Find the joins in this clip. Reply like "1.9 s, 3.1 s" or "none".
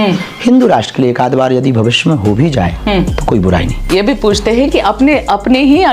3.8 s